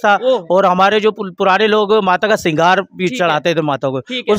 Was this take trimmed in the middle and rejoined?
no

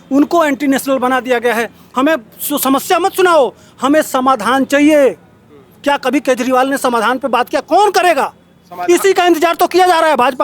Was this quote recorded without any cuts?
no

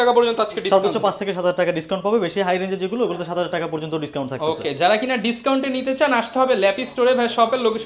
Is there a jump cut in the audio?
no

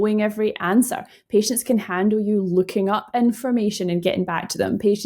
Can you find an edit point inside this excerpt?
no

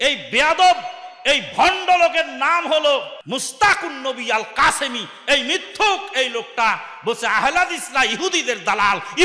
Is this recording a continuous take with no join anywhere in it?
no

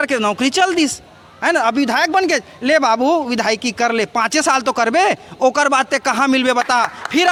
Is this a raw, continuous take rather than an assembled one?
yes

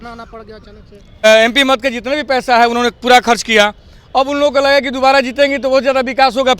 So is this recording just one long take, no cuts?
no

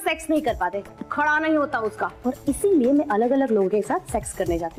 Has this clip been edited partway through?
no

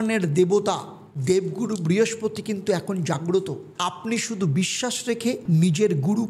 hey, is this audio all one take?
yes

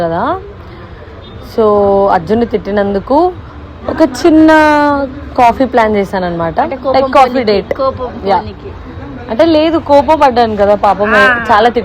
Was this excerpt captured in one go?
yes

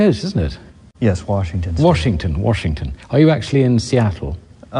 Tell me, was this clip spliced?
yes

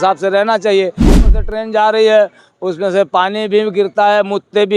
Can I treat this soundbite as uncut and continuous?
no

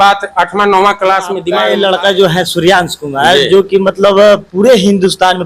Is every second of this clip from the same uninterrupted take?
no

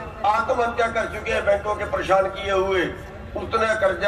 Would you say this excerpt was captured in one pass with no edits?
yes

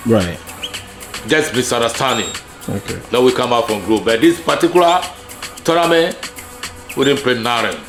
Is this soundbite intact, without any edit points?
yes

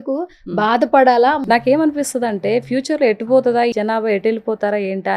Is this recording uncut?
no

